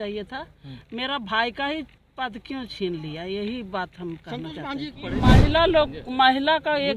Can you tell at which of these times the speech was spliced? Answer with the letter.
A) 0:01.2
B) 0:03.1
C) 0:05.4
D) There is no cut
C